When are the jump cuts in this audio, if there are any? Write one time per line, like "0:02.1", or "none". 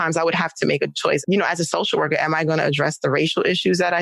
0:01.2